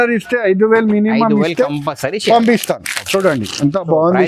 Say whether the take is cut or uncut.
uncut